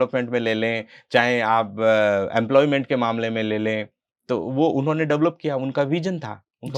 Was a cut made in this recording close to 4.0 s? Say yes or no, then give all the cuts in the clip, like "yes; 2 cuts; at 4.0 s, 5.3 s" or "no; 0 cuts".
no; 0 cuts